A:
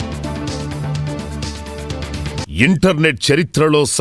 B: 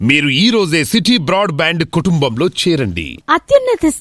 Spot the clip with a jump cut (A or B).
A